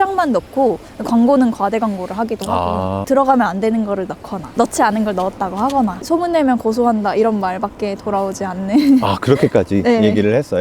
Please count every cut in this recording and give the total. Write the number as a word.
two